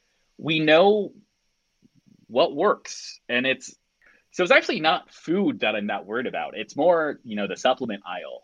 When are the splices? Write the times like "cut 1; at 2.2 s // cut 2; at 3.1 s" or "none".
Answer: cut 1; at 4.2 s